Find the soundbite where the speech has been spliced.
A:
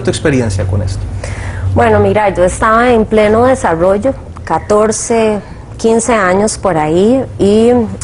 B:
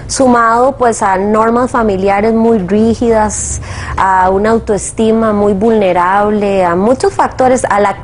A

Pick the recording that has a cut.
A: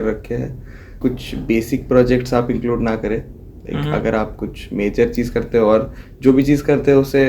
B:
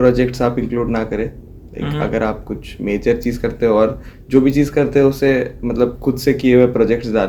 A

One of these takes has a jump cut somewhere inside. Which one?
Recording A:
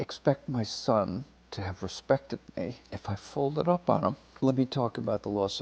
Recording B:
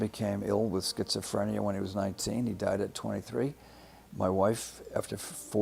A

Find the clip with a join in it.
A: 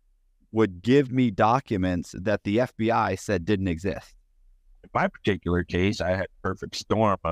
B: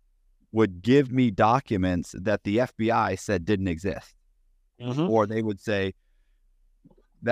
A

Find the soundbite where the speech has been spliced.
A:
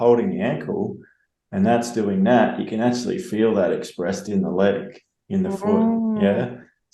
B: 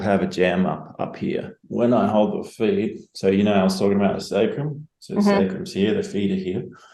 B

